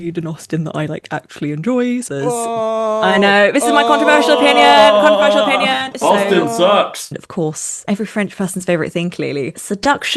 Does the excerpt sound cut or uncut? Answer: cut